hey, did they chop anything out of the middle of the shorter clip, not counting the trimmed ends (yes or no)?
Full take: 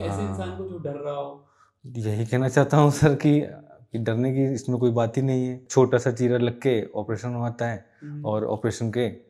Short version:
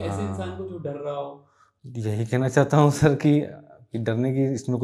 no